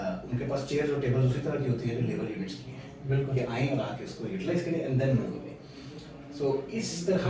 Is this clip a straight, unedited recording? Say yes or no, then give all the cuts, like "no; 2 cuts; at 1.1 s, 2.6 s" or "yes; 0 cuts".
yes; 0 cuts